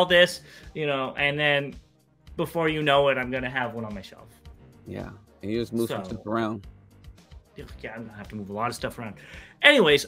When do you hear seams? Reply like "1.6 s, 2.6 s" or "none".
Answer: none